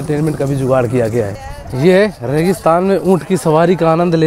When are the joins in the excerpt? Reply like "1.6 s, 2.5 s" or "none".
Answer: 1.4 s

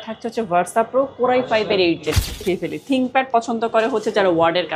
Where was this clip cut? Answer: 2.4 s

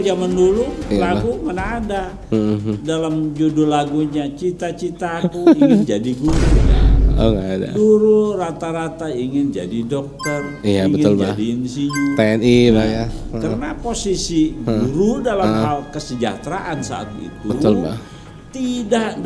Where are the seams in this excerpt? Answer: none

